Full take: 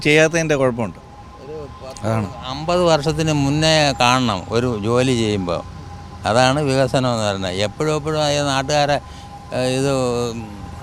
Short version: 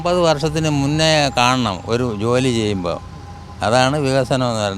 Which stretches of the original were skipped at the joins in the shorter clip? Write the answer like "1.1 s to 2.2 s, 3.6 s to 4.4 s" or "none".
none